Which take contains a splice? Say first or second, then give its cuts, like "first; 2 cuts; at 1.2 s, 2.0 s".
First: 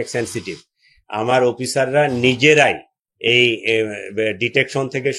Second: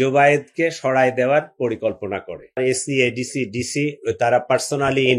second; 1 cut; at 2.6 s